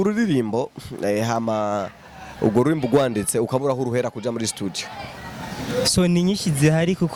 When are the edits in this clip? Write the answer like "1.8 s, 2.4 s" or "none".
none